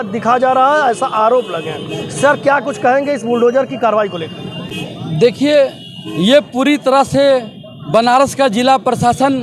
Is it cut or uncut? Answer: uncut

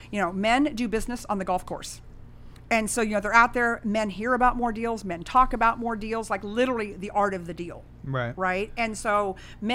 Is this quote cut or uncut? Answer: uncut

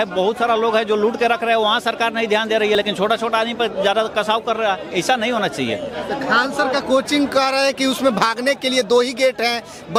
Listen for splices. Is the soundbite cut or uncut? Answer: uncut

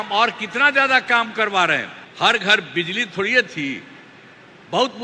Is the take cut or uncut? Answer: cut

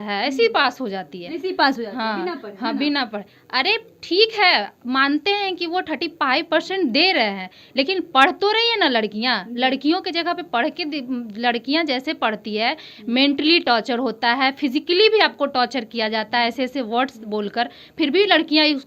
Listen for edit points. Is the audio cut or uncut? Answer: uncut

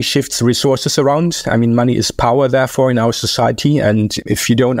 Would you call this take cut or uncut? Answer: uncut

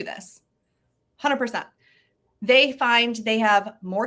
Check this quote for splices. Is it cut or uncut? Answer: uncut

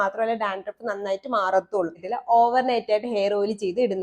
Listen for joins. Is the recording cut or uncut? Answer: cut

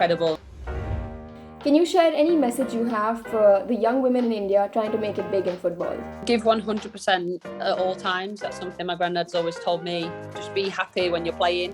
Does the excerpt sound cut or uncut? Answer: cut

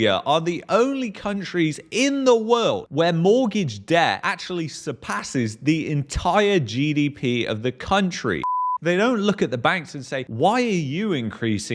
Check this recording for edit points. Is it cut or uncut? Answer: cut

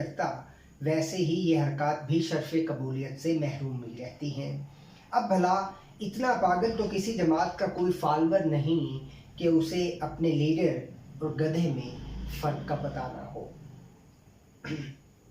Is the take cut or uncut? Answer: uncut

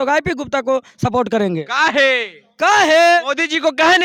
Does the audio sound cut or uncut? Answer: uncut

